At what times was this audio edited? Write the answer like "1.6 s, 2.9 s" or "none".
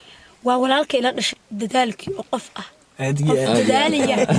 1.3 s